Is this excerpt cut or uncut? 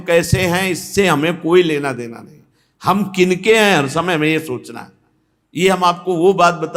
uncut